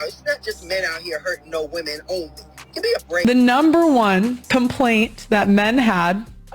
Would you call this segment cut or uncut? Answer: cut